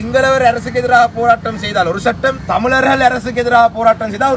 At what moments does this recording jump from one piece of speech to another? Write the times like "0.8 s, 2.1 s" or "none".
2.4 s